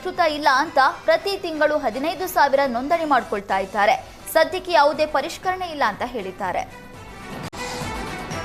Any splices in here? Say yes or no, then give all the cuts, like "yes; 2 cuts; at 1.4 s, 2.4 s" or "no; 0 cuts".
yes; 1 cut; at 7.5 s